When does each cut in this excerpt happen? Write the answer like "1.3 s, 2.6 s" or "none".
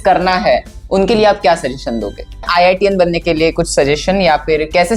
2.5 s